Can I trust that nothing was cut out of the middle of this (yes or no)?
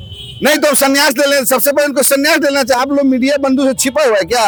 yes